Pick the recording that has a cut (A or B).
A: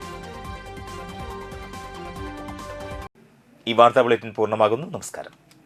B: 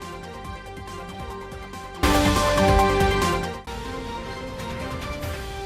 B